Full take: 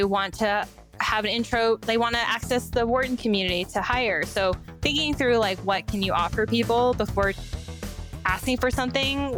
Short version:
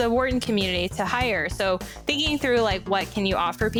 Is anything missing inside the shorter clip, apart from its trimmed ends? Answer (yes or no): no